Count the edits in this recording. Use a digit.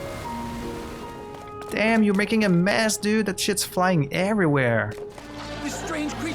2